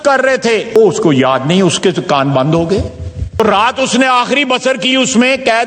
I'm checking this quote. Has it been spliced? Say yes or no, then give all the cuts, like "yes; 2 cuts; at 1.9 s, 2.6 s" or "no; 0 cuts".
yes; 2 cuts; at 0.8 s, 3.4 s